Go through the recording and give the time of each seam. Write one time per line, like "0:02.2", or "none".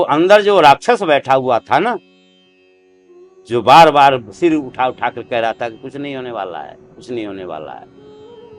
none